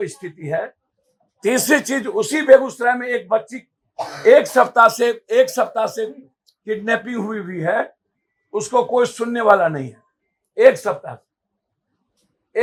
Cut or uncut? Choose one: uncut